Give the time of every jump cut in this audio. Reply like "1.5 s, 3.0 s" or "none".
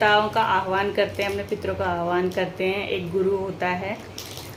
none